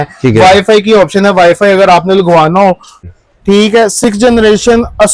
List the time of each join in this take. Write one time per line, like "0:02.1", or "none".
0:03.0